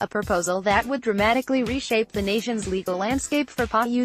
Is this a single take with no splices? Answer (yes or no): yes